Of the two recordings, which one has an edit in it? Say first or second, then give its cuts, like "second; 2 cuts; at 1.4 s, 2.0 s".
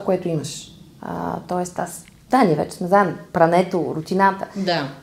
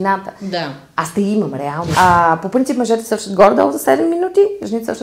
second; 1 cut; at 1.9 s